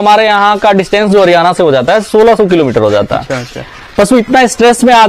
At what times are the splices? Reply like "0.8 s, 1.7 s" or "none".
none